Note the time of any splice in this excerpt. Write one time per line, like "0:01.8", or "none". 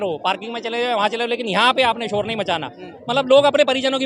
none